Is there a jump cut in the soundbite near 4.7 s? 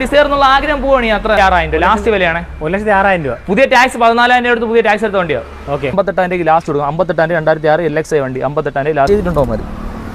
no; 3 cuts; at 1.4 s, 5.9 s, 9.1 s

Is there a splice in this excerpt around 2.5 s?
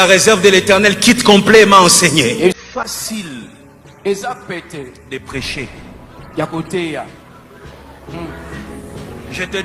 yes; 1 cut; at 2.5 s

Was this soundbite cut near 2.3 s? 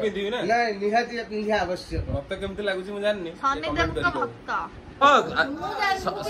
no; 1 cut; at 5.0 s

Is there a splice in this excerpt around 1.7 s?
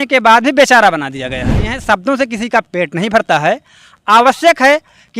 yes; 1 cut; at 1.7 s

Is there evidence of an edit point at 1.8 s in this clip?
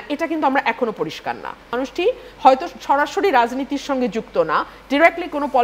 yes; 1 cut; at 1.8 s

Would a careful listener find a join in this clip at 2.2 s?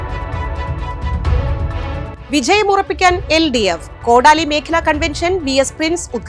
yes; 1 cut; at 2.2 s

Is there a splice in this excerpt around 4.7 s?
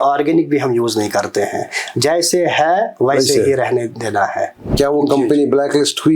yes; 1 cut; at 4.7 s

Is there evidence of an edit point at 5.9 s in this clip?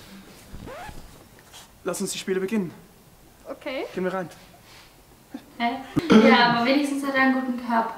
yes; 1 cut; at 5.9 s

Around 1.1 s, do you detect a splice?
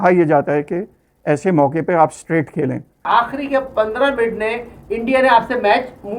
no; 1 cut; at 3.0 s

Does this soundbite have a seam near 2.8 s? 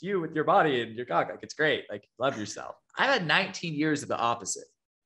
yes; 1 cut; at 2.8 s

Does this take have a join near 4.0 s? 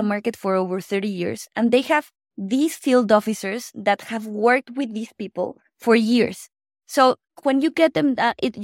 no; 1 cut; at 7.4 s

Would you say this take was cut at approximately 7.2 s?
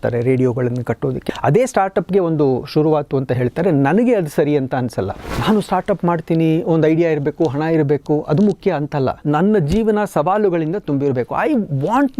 no; 3 cuts; at 1.2 s, 5.2 s, 9.2 s

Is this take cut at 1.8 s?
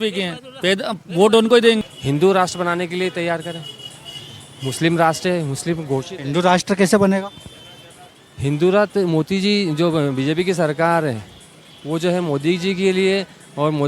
yes; 1 cut; at 1.8 s

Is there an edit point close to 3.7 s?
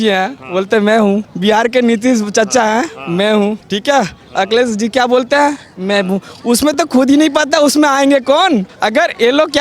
yes; 3 cuts; at 1.3 s, 3.7 s, 8.7 s

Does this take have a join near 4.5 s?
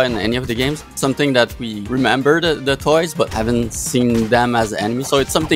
no; 3 cuts; at 0.9 s, 1.7 s, 3.3 s

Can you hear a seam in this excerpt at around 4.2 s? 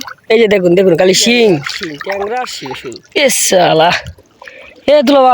no; 2 cuts; at 1.7 s, 2.9 s

